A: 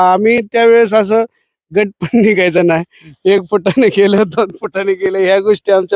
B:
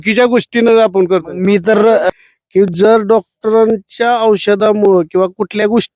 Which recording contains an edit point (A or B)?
B